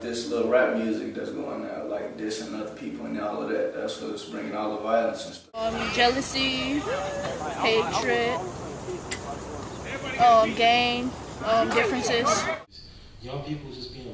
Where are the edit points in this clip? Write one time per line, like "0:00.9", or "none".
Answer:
none

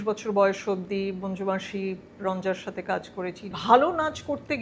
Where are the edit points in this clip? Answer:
0:03.5

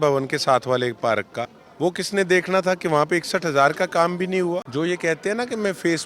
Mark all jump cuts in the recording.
0:01.6
0:04.7

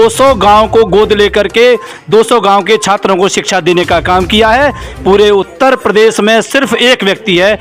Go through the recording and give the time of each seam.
none

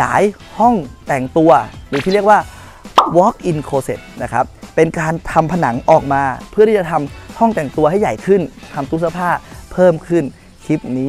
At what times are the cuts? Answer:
none

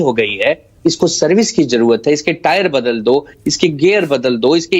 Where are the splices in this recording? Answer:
none

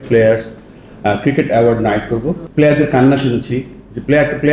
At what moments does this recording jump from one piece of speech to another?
0:02.4

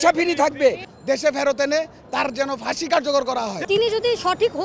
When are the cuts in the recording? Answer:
0:00.9
0:03.6

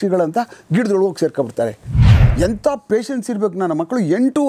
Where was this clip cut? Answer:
0:02.1

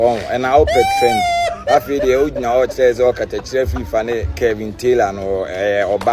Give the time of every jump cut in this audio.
none

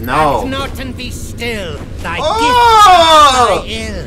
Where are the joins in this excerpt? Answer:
none

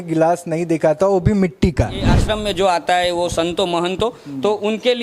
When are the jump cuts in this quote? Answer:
0:02.1

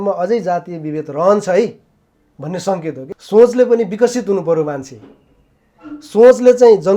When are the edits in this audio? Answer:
0:03.1

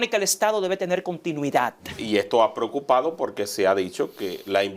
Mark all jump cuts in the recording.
0:02.0

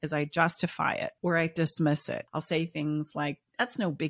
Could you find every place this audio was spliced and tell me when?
0:01.1
0:02.3

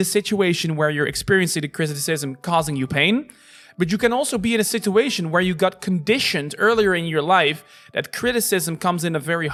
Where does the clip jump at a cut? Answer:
none

